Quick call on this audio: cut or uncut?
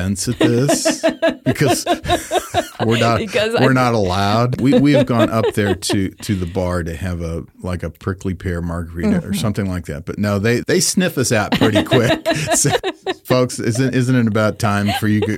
cut